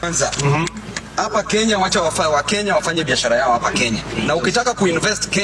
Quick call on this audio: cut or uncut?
uncut